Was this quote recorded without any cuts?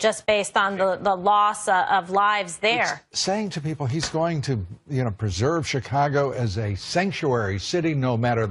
yes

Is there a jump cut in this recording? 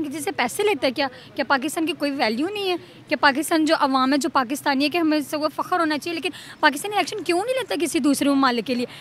no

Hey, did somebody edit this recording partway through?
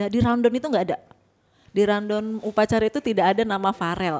no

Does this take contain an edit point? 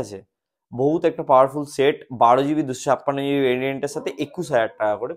no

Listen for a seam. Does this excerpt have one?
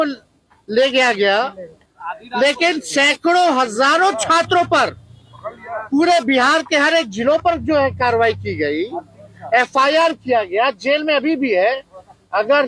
no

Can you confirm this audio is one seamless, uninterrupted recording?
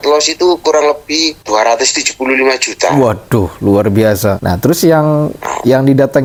yes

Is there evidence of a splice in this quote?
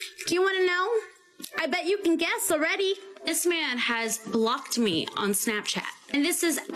no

